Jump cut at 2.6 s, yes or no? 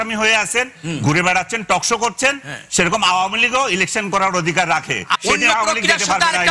no